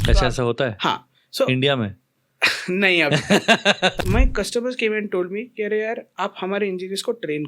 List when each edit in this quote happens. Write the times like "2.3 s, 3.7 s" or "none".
3.9 s